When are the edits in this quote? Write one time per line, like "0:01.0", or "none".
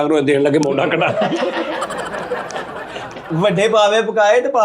0:03.2